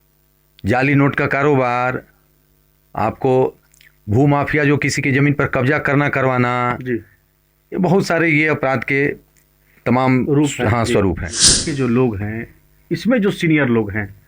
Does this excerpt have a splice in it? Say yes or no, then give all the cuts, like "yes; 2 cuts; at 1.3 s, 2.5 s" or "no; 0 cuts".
yes; 1 cut; at 11.7 s